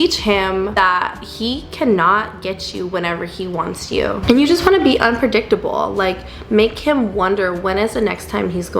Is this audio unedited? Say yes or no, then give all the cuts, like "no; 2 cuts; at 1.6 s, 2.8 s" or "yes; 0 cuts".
yes; 0 cuts